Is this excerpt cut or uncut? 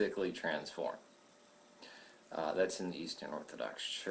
uncut